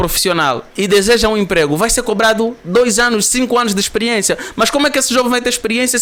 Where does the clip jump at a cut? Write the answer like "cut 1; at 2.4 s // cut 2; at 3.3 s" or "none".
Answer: none